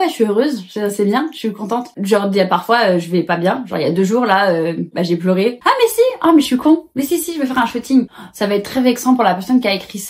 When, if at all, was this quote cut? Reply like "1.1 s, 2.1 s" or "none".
1.9 s, 5.6 s, 8.1 s